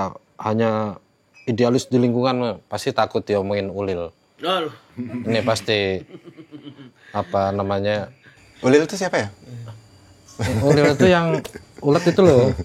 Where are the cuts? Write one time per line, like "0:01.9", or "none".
none